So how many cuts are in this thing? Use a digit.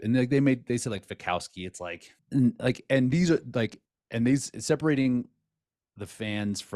1